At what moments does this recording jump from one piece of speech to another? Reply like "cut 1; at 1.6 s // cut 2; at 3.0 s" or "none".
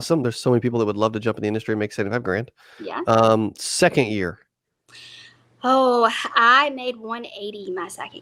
none